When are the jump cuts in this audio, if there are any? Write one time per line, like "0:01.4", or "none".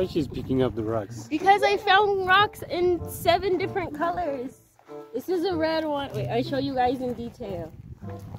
none